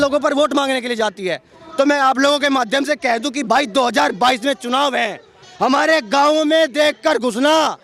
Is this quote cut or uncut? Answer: uncut